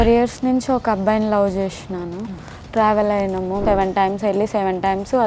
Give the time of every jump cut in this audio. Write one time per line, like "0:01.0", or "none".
0:03.6